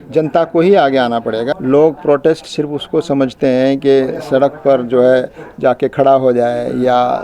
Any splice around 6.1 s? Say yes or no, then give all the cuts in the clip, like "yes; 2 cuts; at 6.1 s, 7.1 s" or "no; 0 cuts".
no; 1 cut; at 1.5 s